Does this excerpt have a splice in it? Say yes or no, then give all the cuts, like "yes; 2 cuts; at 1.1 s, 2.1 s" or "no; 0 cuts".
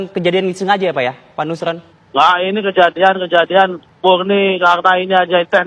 yes; 2 cuts; at 1.9 s, 3.8 s